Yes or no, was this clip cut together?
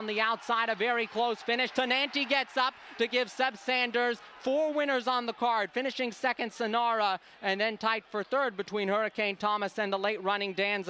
no